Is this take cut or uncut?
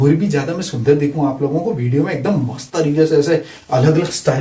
uncut